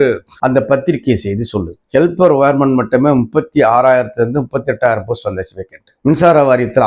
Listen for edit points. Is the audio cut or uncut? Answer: cut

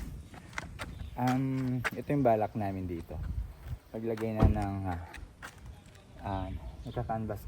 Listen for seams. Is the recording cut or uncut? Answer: uncut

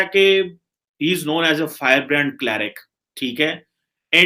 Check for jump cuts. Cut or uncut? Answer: uncut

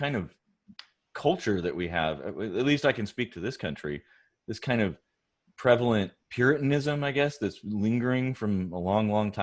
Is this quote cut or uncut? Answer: uncut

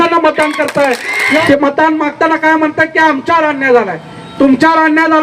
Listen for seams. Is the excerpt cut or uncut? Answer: cut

